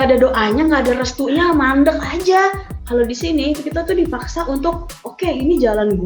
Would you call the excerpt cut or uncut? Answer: cut